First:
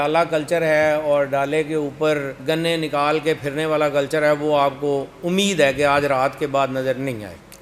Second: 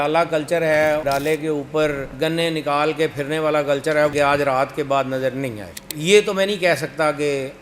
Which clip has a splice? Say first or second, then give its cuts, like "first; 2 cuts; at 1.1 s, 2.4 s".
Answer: second; 3 cuts; at 1.0 s, 4.1 s, 5.9 s